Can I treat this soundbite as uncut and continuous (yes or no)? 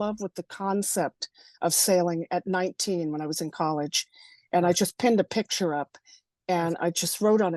yes